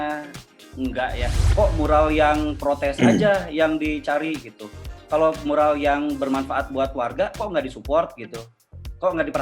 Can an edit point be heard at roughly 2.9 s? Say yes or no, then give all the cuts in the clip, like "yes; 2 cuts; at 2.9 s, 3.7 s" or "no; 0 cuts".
no; 1 cut; at 1.3 s